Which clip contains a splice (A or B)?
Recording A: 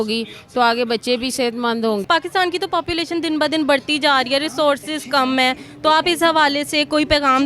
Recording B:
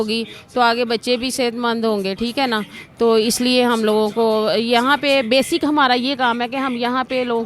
A